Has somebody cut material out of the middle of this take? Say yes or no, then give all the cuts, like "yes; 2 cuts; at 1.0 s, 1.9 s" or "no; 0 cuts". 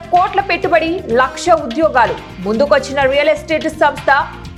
no; 0 cuts